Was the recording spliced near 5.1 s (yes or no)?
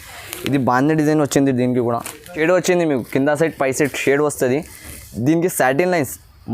no